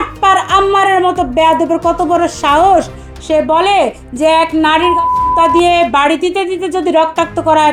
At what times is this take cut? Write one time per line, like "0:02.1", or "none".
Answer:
none